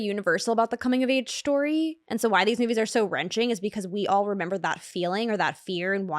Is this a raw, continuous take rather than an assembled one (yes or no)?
no